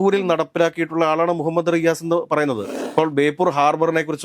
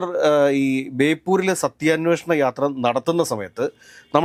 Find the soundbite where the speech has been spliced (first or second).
first